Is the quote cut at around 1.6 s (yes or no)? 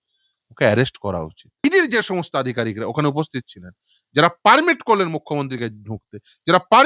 yes